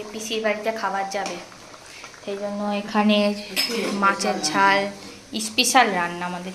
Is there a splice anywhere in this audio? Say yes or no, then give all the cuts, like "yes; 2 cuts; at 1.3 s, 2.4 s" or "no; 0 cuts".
no; 0 cuts